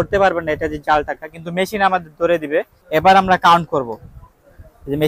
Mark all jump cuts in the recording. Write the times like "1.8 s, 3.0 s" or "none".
2.8 s